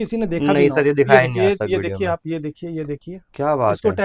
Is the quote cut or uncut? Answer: uncut